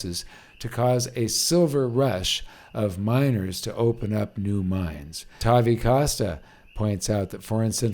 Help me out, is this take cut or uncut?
cut